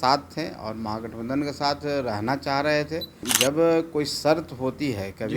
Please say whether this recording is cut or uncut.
cut